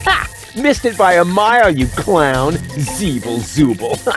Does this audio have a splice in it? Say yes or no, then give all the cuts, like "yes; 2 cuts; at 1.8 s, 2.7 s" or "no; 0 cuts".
no; 0 cuts